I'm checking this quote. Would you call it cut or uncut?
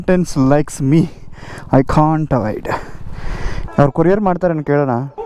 cut